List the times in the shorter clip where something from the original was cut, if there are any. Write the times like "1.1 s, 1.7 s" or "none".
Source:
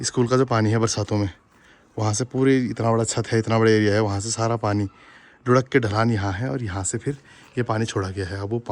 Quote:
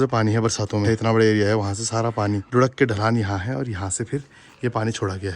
0.8 s, 2.4 s